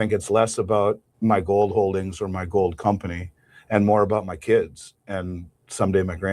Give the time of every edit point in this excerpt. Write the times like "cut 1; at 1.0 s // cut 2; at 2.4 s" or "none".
cut 1; at 1.1 s